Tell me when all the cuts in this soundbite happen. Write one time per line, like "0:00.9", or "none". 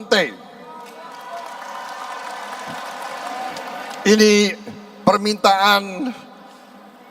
0:03.5